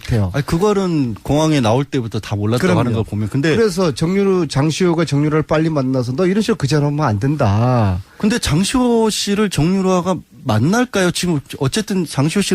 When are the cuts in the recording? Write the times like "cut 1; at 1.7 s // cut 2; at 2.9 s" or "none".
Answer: cut 1; at 9.2 s